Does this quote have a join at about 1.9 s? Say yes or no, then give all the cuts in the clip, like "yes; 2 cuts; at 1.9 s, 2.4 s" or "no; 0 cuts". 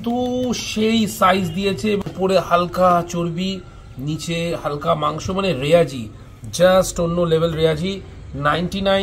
no; 0 cuts